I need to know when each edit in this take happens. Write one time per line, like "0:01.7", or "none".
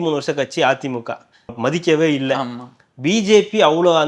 0:01.5